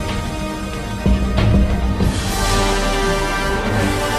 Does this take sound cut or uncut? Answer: uncut